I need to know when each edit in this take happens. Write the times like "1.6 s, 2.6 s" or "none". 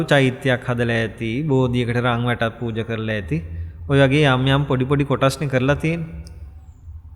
none